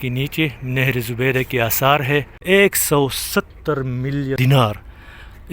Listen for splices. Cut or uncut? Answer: cut